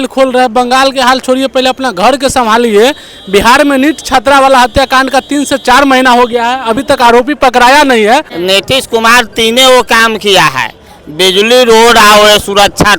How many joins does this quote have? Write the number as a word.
one